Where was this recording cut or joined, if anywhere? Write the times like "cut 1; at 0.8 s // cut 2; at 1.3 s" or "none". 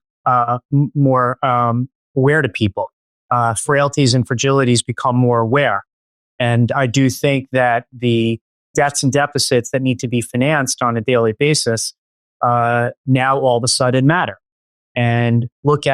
cut 1; at 8.5 s